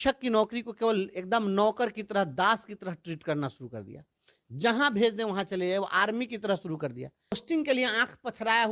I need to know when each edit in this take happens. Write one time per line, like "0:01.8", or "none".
0:07.4